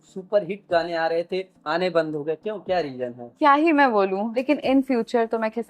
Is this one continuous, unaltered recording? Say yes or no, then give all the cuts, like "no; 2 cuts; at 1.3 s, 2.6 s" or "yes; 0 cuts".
no; 3 cuts; at 1.5 s, 3.2 s, 4.4 s